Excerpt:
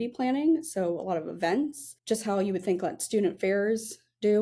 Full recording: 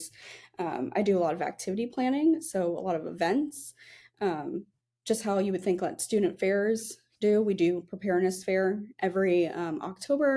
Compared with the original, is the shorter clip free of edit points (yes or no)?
no